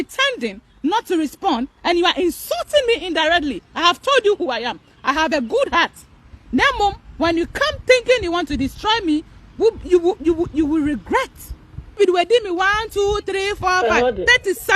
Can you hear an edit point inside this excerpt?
yes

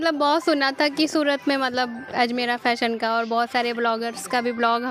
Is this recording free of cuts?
yes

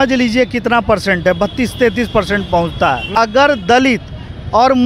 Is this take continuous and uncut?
no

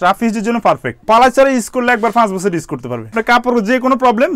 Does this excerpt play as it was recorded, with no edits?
no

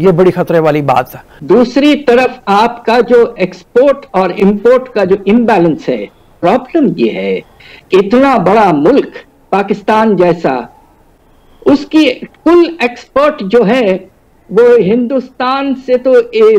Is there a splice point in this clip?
yes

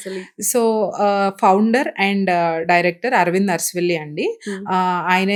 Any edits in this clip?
no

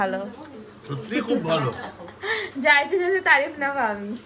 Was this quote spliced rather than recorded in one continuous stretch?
no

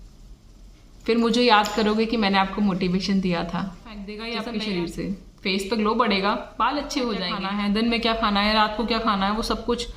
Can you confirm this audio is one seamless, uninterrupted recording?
no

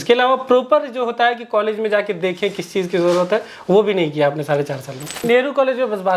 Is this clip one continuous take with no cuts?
no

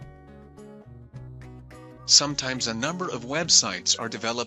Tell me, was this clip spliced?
no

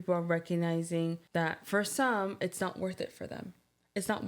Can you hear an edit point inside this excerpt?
yes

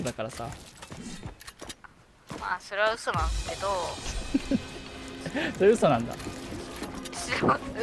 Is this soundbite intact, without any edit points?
yes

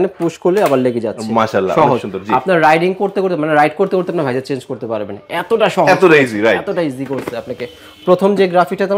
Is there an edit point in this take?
no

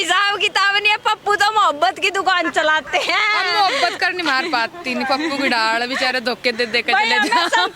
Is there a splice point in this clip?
no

